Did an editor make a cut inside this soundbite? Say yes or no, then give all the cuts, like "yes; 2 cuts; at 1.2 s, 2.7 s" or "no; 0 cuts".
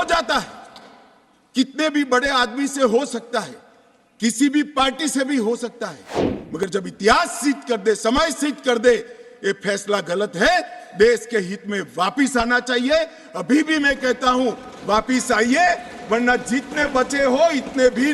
no; 0 cuts